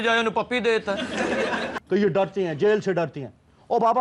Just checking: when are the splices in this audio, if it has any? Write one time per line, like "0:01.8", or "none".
0:01.7